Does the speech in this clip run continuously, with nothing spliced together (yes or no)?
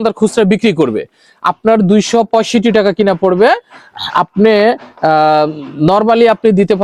yes